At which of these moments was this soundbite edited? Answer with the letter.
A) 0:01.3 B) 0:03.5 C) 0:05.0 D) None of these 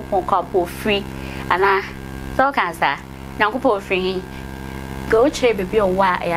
D